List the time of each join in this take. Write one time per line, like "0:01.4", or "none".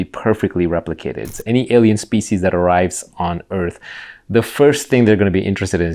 0:01.3